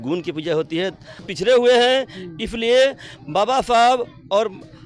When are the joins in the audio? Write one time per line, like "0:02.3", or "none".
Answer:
0:01.3